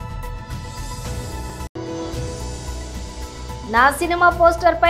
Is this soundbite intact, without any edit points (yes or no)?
no